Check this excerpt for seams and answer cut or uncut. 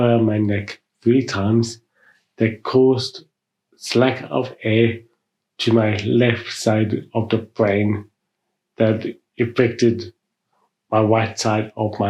uncut